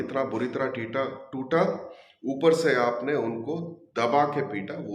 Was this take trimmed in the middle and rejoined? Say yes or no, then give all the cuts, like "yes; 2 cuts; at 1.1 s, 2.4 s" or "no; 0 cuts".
no; 0 cuts